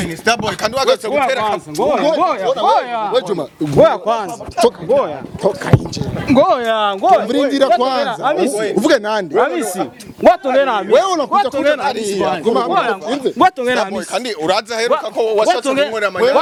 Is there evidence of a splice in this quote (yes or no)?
no